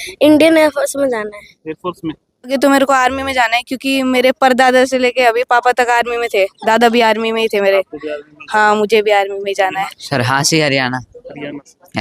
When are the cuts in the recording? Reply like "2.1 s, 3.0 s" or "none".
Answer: 2.5 s, 10.0 s